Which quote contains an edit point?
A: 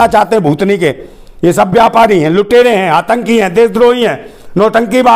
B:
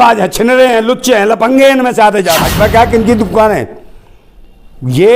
B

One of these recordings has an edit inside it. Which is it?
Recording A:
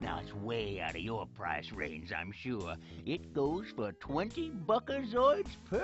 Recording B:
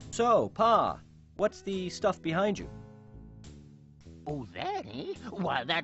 B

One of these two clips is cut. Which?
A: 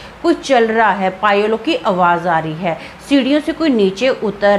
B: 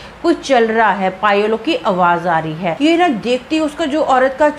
B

